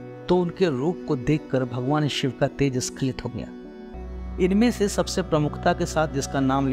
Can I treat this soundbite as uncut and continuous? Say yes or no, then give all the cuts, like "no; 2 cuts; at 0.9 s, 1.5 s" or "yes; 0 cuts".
no; 1 cut; at 3.9 s